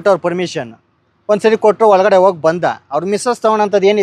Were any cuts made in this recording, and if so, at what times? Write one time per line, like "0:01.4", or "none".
none